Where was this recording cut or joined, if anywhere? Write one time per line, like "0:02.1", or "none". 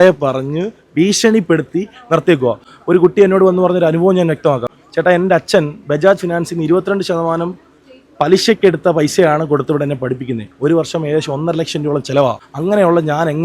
0:04.6
0:12.5